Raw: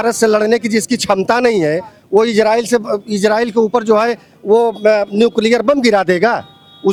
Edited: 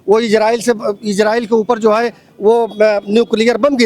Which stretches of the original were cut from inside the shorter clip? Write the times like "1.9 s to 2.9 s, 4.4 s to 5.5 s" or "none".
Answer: none